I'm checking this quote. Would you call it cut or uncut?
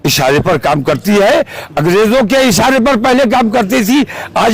uncut